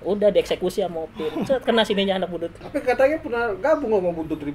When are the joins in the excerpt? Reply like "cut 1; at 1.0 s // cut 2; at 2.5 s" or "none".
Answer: cut 1; at 2.6 s